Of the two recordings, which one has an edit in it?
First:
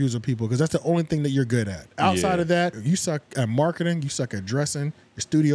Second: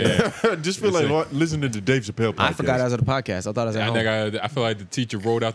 first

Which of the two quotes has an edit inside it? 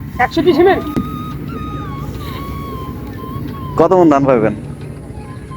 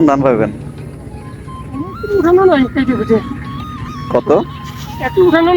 first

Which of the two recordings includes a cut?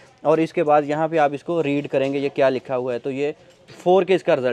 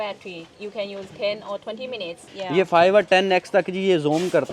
second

